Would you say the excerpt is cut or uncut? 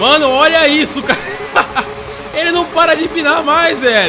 uncut